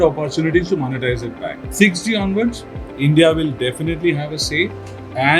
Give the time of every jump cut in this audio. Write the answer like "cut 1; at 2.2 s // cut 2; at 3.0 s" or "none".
cut 1; at 1.6 s